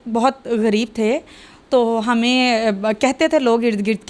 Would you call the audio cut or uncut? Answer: uncut